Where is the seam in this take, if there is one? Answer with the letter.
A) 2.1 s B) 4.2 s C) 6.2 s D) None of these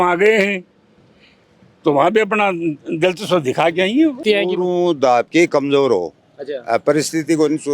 B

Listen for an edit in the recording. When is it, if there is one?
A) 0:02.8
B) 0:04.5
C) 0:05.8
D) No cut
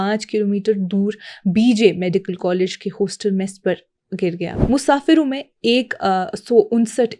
B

